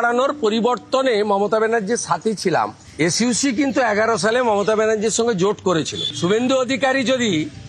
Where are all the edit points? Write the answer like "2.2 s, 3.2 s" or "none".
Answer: 6.0 s